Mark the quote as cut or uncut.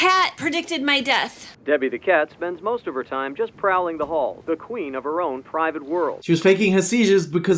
cut